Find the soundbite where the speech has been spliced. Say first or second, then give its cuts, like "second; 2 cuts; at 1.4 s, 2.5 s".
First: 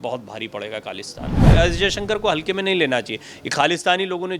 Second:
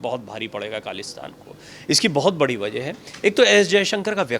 first; 1 cut; at 1.5 s